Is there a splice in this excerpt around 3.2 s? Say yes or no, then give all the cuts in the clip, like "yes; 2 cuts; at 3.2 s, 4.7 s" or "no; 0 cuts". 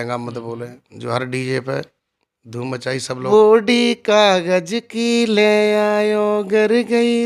yes; 1 cut; at 3.2 s